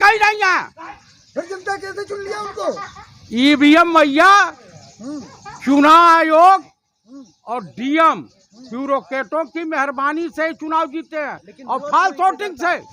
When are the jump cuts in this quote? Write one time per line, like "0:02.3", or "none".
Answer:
none